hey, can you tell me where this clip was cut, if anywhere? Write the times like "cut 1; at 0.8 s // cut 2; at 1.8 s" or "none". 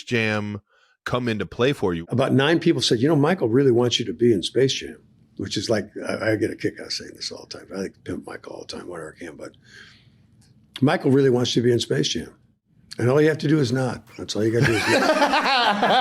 cut 1; at 2.0 s